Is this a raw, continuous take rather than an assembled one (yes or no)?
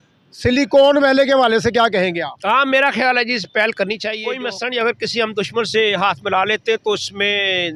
yes